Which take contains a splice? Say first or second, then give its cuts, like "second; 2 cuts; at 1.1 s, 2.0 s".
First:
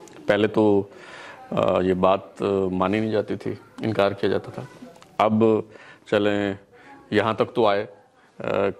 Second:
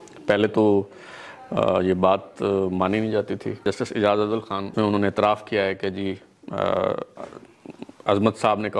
second; 2 cuts; at 3.6 s, 4.7 s